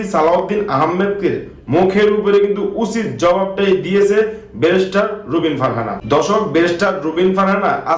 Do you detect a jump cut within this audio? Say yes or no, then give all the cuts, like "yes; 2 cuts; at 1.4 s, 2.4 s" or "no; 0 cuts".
no; 0 cuts